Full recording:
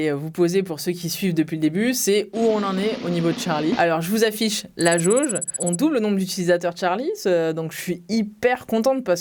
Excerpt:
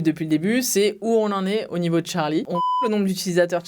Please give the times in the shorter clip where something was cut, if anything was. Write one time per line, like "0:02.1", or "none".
0:02.4

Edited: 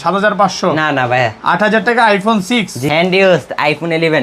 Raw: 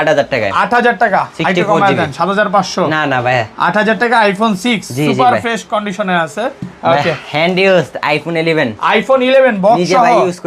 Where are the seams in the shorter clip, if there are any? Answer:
0:02.8

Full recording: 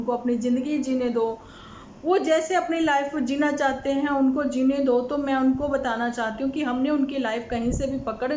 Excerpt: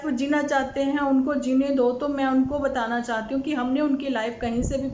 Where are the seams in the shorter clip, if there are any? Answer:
none

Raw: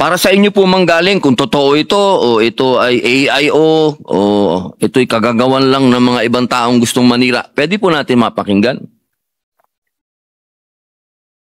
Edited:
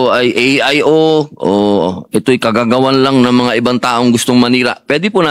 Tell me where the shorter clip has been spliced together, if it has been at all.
none

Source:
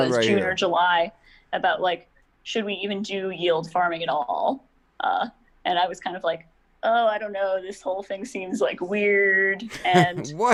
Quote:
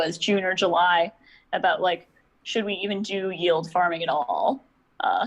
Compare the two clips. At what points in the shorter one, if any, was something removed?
none

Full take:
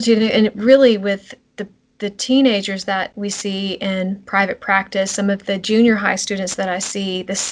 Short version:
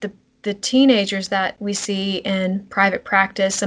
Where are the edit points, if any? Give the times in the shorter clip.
none

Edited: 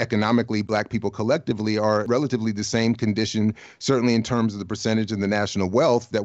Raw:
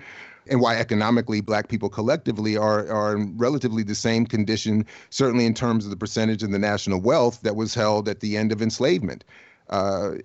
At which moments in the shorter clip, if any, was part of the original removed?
0:02.0

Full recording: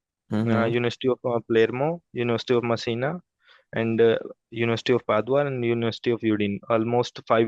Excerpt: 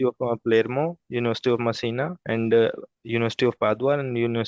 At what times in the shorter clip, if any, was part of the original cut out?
0:02.2

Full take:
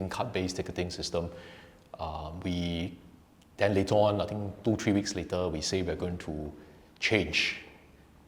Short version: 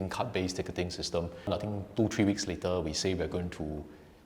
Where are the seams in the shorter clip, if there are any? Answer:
0:01.5

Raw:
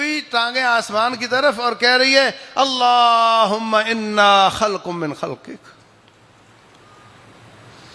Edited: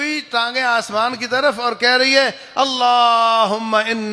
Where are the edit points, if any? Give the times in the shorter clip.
none

